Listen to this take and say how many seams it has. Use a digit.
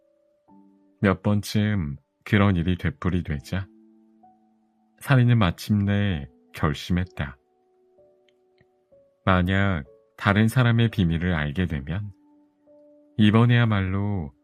0